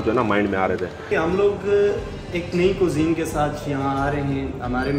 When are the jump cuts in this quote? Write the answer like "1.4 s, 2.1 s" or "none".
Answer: 1.0 s